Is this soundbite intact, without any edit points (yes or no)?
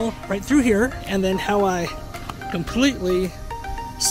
yes